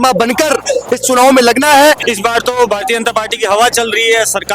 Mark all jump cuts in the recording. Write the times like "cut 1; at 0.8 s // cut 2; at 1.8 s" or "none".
cut 1; at 2.0 s